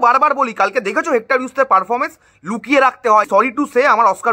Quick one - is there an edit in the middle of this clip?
yes; 1 cut; at 3.3 s

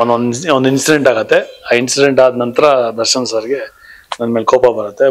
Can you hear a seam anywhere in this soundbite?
no; 0 cuts

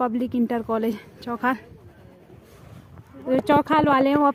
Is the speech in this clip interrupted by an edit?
no; 0 cuts

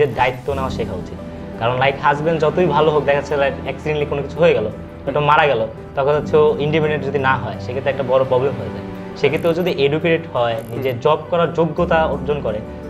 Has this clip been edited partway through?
no; 0 cuts

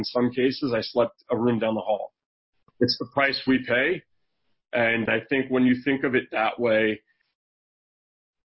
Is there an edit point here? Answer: yes; 3 cuts; at 1.2 s, 2.7 s, 5.1 s

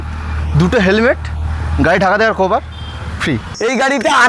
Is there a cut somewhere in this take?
yes; 1 cut; at 3.4 s

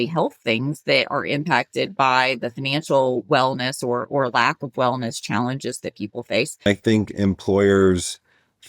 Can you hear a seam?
yes; 1 cut; at 6.7 s

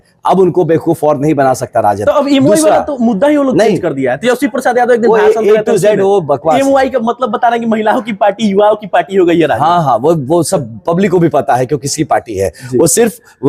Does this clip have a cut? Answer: no; 0 cuts

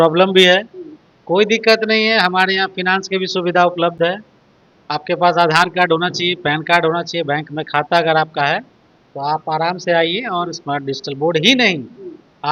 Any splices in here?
no; 0 cuts

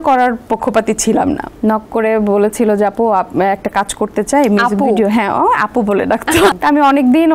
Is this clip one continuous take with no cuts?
no; 2 cuts; at 1.5 s, 6.5 s

